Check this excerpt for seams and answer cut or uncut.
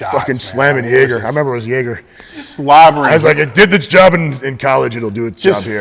uncut